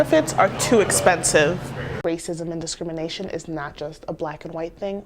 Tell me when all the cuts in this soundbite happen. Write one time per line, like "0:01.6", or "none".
0:01.9